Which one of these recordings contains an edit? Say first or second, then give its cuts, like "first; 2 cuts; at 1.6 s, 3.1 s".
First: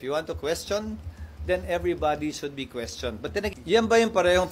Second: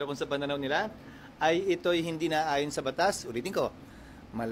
first; 1 cut; at 3.5 s